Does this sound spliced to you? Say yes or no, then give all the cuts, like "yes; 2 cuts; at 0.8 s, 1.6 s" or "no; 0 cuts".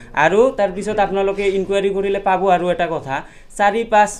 no; 0 cuts